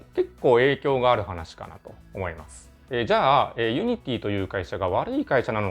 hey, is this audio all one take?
yes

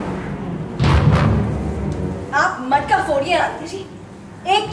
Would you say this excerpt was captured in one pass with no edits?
no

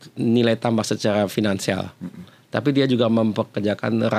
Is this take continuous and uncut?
yes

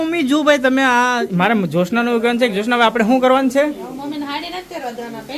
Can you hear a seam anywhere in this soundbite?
no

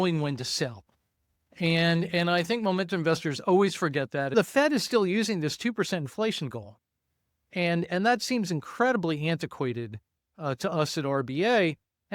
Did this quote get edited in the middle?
yes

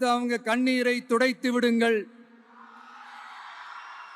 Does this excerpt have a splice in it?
no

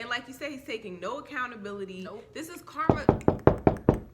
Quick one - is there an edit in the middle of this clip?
yes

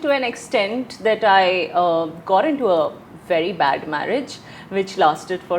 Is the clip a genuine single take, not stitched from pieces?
yes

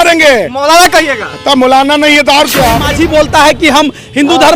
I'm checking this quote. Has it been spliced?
yes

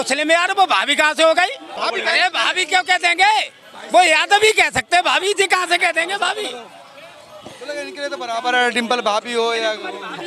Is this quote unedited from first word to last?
yes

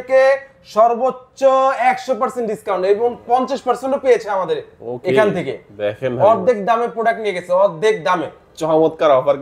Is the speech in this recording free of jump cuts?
yes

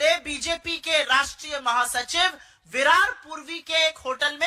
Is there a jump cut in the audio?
no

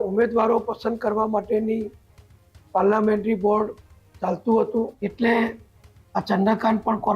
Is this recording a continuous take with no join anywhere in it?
no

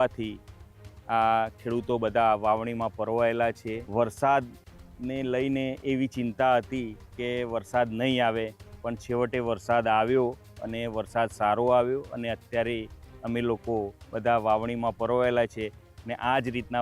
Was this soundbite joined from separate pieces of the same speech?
yes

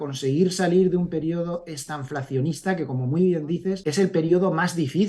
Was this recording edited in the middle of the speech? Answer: yes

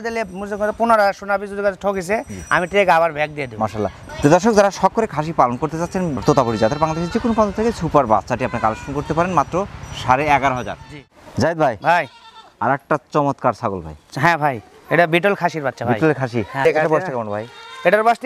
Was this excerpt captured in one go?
yes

